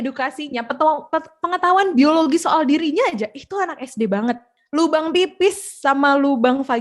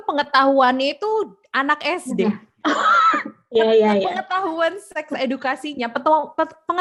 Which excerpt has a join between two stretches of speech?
first; 1 cut; at 4.5 s

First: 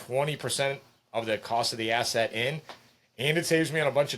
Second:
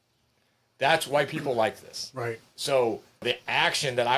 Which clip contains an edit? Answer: second; 1 cut; at 3.2 s

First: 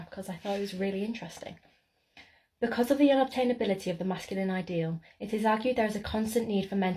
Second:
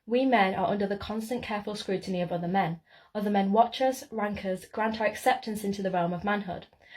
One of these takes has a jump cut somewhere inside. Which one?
second; 1 cut; at 3.2 s

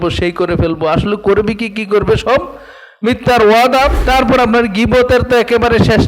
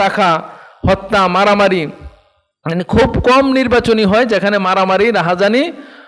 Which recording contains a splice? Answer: first; 1 cut; at 4.0 s

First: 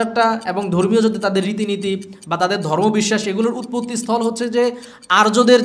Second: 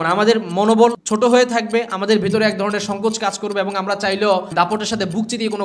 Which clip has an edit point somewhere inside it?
second; 2 cuts; at 1.0 s, 4.5 s

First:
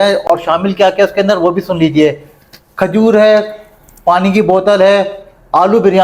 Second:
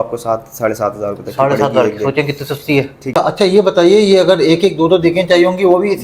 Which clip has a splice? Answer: second; 1 cut; at 3.1 s

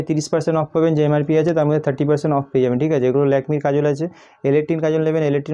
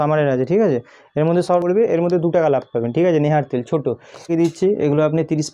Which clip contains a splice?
second; 2 cuts; at 1.6 s, 4.3 s

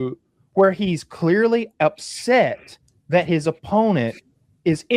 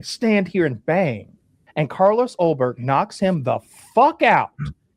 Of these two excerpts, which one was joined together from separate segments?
second; 1 cut; at 1.7 s

